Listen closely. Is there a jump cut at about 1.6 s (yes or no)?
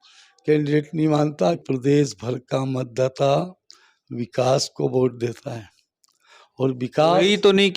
yes